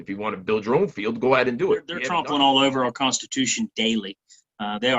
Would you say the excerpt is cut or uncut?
cut